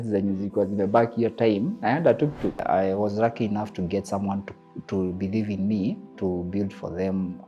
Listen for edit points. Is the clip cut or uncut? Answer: cut